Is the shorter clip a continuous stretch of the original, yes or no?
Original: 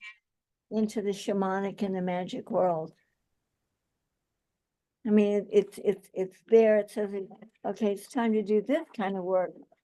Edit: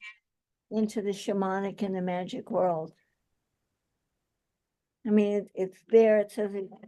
no